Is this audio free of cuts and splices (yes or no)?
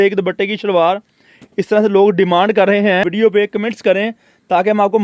no